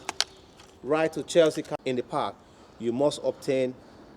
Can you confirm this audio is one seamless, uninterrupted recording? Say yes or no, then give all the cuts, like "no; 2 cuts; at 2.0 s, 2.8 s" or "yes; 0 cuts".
no; 1 cut; at 1.7 s